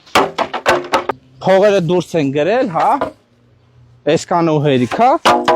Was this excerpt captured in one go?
no; 1 cut; at 1.2 s

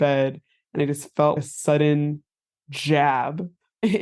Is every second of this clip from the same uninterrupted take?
yes; 0 cuts

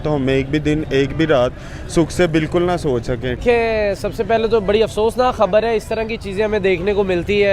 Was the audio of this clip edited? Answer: yes; 1 cut; at 3.4 s

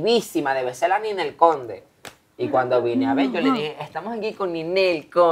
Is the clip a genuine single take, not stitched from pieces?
yes; 0 cuts

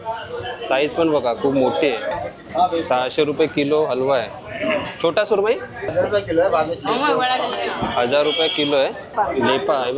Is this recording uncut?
no; 3 cuts; at 2.1 s, 5.9 s, 9.1 s

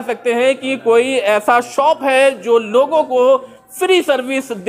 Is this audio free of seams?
yes; 0 cuts

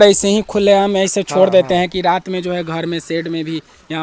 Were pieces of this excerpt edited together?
no; 0 cuts

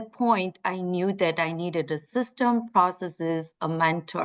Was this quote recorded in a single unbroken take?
yes; 0 cuts

